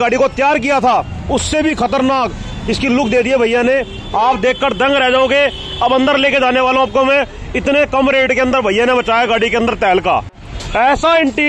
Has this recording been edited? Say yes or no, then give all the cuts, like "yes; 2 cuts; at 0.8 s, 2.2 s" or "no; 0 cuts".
no; 0 cuts